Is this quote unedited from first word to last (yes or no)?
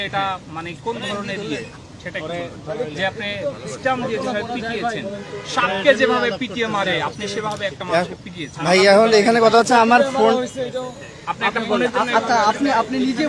yes